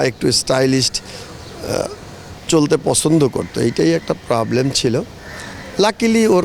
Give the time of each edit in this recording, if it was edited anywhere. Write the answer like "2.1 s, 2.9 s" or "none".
none